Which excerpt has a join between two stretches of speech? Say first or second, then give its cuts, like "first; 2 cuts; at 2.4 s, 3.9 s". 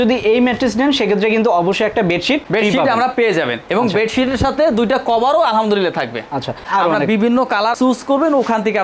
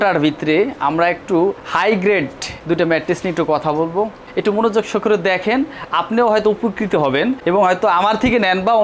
first; 2 cuts; at 6.6 s, 7.7 s